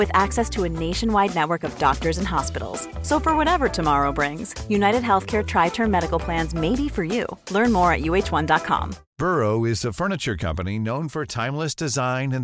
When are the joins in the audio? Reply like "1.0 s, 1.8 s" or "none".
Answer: 9.0 s